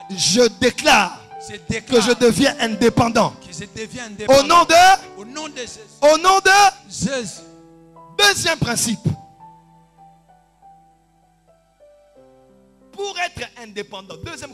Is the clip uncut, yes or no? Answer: yes